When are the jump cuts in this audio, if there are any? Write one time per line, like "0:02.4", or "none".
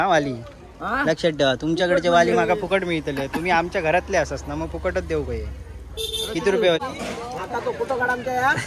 0:06.8